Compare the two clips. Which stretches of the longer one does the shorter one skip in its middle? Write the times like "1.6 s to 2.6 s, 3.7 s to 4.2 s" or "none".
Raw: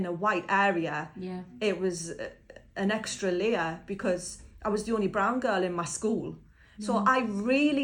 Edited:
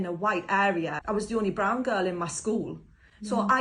1.0 s to 4.5 s